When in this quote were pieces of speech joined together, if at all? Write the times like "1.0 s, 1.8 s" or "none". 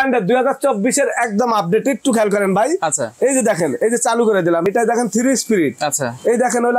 4.7 s